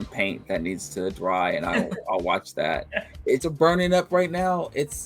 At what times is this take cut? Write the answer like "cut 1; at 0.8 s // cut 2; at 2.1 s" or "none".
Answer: cut 1; at 3.4 s